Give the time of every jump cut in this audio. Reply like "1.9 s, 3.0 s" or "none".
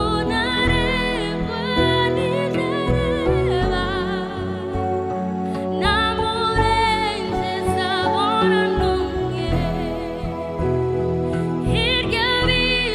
none